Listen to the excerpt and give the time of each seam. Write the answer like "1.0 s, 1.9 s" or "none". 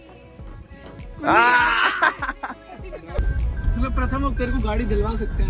3.2 s